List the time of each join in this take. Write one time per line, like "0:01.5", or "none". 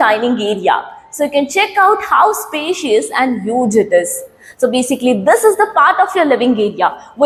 none